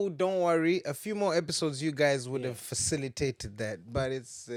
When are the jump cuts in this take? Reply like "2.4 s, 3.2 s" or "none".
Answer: none